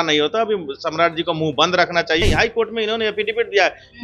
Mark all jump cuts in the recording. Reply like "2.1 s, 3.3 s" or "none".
2.2 s